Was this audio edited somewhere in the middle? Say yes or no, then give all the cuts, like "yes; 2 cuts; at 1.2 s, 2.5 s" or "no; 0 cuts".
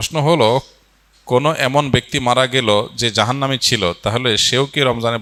no; 0 cuts